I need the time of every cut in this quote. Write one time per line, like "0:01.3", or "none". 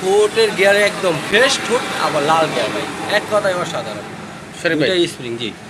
none